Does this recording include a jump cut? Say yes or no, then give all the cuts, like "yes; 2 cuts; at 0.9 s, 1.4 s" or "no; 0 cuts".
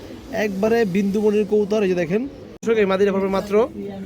yes; 1 cut; at 2.6 s